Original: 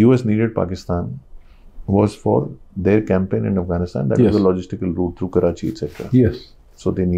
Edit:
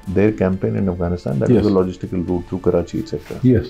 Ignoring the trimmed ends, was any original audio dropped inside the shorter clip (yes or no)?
no